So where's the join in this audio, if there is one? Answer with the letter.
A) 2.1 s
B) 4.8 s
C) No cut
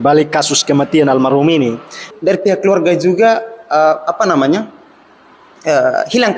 A